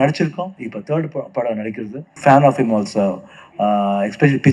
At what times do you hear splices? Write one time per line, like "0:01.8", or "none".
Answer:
0:02.2